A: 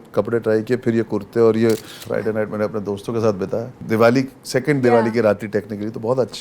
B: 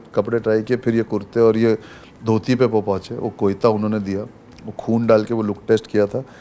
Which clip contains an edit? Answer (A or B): A